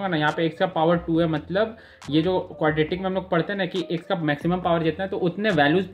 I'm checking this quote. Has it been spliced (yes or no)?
no